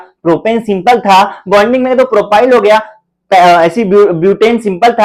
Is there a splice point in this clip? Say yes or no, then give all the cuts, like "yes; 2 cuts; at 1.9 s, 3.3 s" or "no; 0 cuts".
no; 0 cuts